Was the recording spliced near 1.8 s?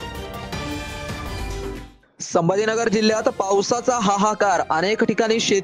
no; 0 cuts

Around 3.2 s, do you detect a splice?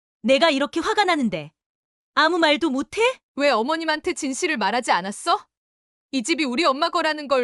yes; 1 cut; at 3.2 s

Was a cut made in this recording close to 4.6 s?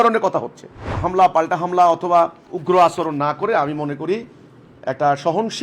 no; 2 cuts; at 1.0 s, 2.5 s

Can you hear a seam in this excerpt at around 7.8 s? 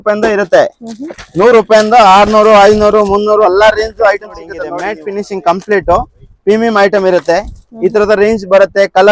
no; 1 cut; at 4.7 s

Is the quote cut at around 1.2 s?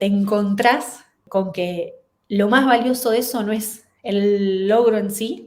yes; 1 cut; at 1.2 s

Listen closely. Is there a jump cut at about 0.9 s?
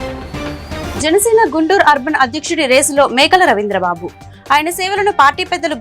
yes; 1 cut; at 0.9 s

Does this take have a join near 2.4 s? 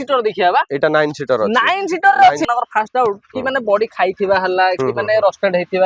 yes; 1 cut; at 2.4 s

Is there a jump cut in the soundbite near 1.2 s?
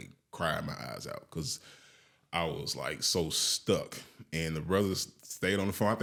no; 0 cuts

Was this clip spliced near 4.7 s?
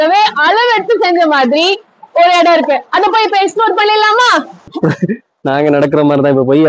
yes; 1 cut; at 4.7 s

